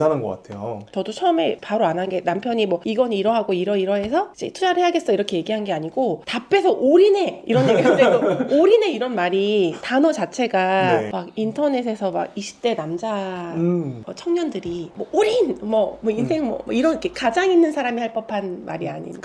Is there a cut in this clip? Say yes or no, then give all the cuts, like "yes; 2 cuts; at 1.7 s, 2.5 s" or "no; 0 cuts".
no; 0 cuts